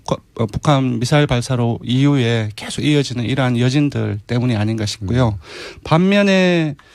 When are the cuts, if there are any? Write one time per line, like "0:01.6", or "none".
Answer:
none